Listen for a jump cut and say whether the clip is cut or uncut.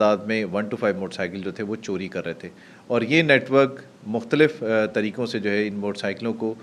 uncut